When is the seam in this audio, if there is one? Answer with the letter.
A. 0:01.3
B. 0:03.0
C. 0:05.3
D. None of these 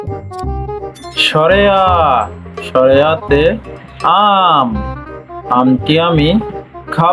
A